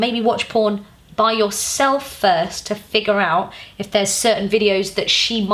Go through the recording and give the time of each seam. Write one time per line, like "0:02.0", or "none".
none